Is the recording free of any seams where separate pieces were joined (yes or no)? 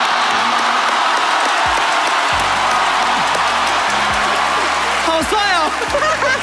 yes